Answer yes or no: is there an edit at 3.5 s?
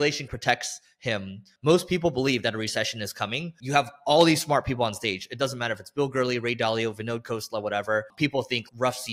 yes